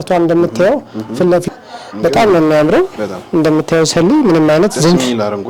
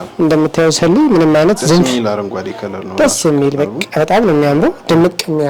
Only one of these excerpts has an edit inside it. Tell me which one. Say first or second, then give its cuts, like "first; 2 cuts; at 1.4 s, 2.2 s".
first; 1 cut; at 1.5 s